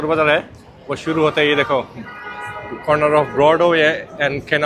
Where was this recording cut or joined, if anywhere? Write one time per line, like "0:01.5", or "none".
none